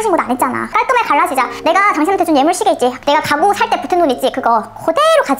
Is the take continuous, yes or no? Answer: no